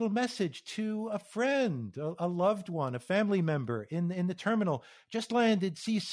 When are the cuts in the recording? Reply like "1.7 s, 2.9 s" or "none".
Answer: none